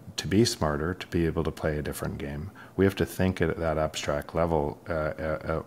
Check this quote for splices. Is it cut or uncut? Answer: uncut